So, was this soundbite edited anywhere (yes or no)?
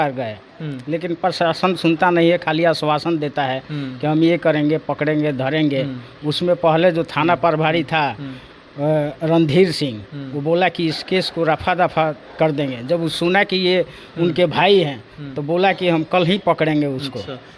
no